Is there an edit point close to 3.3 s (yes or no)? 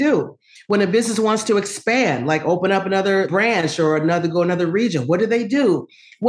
yes